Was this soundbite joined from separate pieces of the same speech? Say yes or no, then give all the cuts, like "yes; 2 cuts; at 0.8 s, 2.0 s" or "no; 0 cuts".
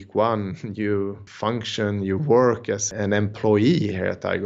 yes; 2 cuts; at 1.3 s, 2.9 s